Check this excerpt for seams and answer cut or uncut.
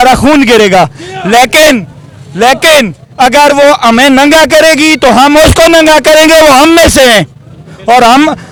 uncut